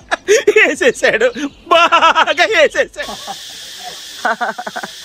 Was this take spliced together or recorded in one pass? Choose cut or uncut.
uncut